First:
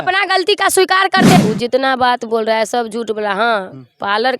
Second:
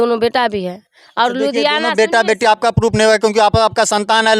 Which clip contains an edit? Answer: first; 1 cut; at 1.4 s

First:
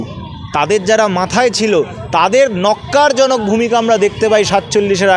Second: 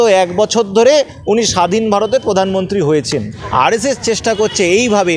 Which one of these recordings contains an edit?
second; 1 cut; at 3.3 s

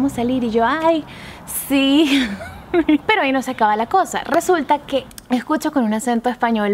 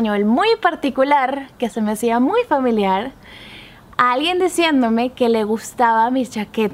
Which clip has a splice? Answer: first; 2 cuts; at 3.0 s, 5.1 s

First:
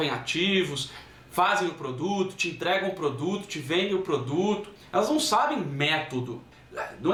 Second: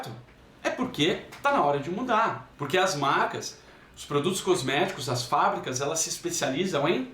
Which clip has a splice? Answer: second; 1 cut; at 2.5 s

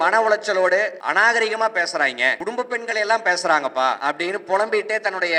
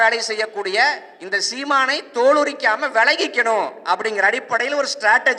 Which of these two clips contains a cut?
first; 3 cuts; at 1.0 s, 2.4 s, 4.0 s

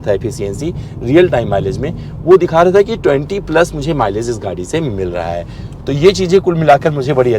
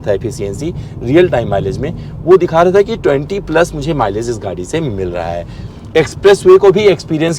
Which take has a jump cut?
second; 1 cut; at 5.7 s

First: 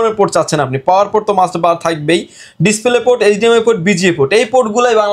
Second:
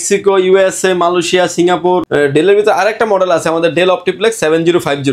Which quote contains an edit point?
second; 1 cut; at 2.1 s

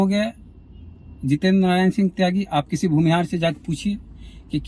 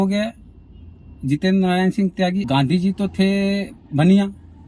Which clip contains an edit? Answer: second; 1 cut; at 2.5 s

